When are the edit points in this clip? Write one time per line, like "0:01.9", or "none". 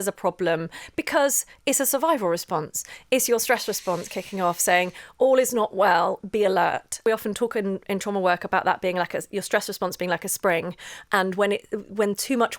0:07.0